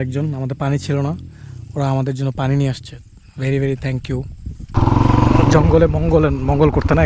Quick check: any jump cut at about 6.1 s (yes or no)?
no